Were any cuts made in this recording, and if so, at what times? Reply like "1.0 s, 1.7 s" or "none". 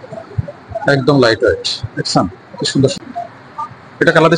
2.9 s